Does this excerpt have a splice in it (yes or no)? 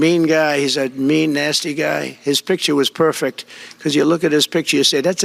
no